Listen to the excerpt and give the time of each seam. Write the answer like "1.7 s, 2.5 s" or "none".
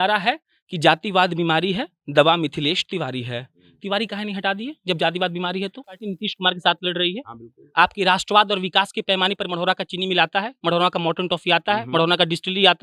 5.9 s